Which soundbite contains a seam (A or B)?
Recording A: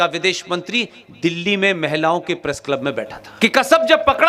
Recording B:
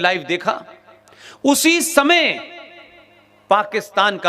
A